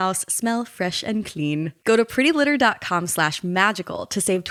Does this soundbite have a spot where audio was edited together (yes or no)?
no